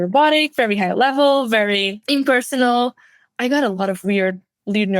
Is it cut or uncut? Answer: cut